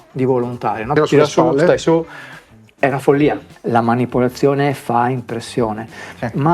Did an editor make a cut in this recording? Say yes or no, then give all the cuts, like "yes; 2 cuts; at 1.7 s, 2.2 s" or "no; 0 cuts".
yes; 2 cuts; at 0.9 s, 3.5 s